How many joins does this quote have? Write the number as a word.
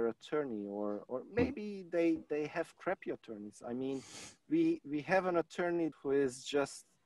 one